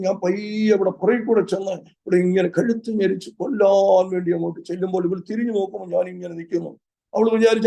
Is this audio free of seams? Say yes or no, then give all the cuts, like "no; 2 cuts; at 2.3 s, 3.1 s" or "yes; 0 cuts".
yes; 0 cuts